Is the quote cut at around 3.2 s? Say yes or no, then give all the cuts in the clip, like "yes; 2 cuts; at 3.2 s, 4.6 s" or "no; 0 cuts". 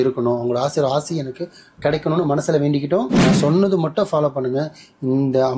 yes; 1 cut; at 3.2 s